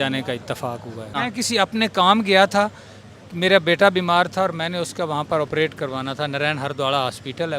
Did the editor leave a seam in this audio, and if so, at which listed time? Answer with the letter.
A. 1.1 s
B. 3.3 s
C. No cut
A